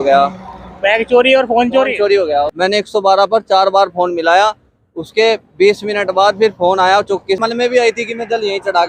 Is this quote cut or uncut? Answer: cut